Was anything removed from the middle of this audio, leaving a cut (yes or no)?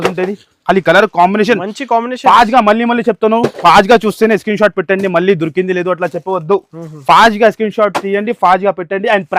no